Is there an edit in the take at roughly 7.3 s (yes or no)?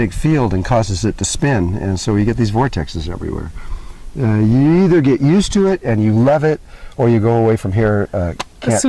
yes